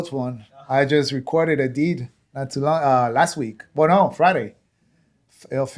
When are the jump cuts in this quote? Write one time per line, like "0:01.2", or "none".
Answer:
none